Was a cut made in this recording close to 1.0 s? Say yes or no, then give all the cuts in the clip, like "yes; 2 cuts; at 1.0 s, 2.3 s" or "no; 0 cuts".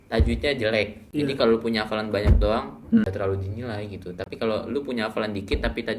yes; 2 cuts; at 1.0 s, 3.0 s